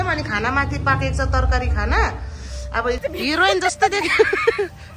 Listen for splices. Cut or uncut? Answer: cut